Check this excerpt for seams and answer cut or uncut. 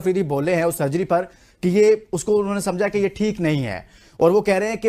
uncut